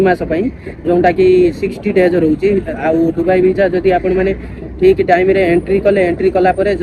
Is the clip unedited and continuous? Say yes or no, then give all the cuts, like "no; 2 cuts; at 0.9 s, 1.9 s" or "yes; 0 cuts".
yes; 0 cuts